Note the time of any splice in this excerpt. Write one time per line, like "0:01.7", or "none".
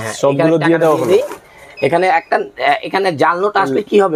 none